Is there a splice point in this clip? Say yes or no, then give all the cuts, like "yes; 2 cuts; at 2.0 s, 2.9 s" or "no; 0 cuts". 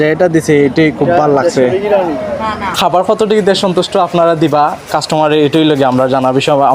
yes; 1 cut; at 2.8 s